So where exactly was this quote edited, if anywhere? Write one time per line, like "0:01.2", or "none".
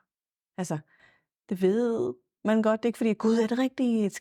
none